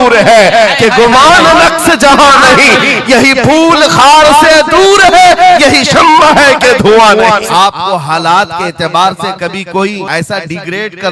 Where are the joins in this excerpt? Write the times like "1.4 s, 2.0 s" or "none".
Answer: 7.5 s, 10.0 s